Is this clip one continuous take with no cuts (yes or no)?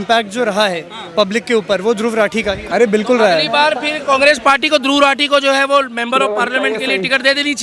no